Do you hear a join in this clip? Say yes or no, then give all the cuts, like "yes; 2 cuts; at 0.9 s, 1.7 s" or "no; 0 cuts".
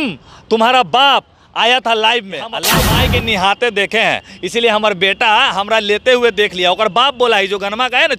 yes; 1 cut; at 2.7 s